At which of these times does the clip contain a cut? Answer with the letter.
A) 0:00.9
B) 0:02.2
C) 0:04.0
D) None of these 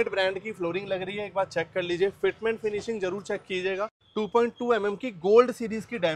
C